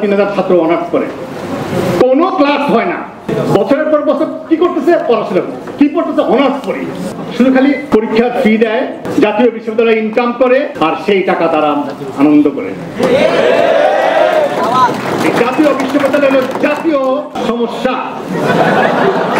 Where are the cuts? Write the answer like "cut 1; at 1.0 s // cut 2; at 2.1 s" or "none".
cut 1; at 3.3 s // cut 2; at 7.1 s // cut 3; at 7.8 s // cut 4; at 9.0 s // cut 5; at 10.7 s // cut 6; at 17.3 s